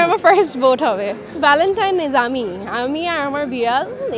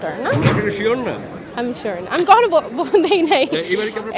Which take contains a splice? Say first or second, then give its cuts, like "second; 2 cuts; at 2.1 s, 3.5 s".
first; 1 cut; at 1.3 s